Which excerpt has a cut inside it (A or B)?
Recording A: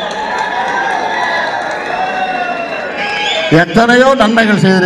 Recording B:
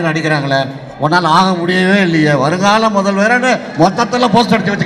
A